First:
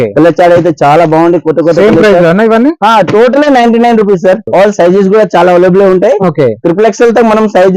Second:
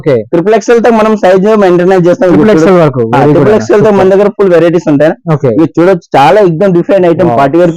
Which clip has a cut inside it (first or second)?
first